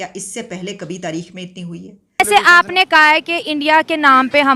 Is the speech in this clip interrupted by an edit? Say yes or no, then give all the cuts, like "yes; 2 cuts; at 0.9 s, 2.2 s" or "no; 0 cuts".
yes; 1 cut; at 2.2 s